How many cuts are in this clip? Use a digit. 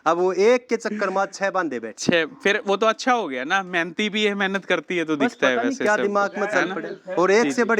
0